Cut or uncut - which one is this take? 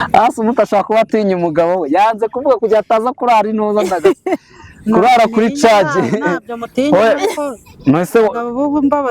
uncut